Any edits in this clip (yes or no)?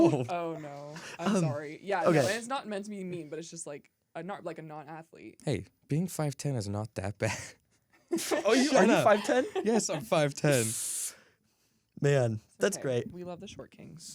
yes